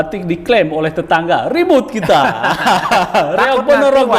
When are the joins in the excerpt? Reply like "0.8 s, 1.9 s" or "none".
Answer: none